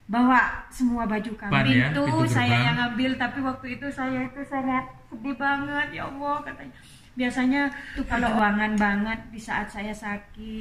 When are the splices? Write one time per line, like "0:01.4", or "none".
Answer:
0:01.5
0:08.3